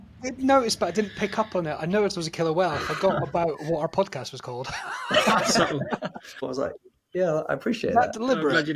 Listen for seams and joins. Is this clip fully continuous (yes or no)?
no